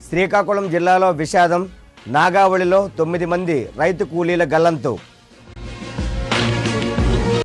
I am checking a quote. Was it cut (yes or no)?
no